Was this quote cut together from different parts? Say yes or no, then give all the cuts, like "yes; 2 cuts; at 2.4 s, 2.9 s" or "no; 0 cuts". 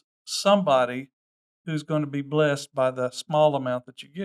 no; 0 cuts